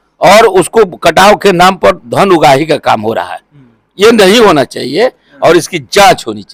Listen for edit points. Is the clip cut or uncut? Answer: uncut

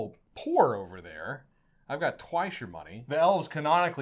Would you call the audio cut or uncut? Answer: cut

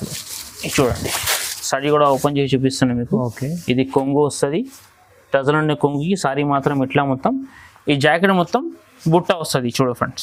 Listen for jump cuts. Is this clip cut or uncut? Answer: uncut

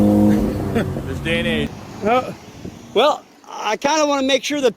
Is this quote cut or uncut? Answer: cut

